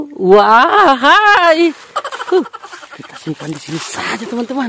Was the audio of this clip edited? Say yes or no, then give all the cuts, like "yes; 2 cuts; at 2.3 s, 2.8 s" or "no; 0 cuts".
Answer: no; 0 cuts